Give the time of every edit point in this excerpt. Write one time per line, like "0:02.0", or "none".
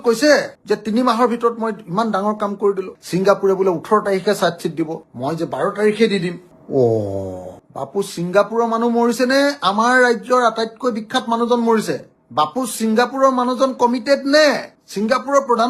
none